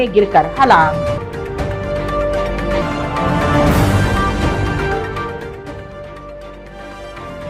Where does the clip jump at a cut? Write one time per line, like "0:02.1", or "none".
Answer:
none